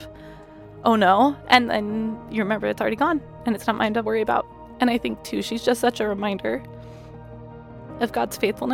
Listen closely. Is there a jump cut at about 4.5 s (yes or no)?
yes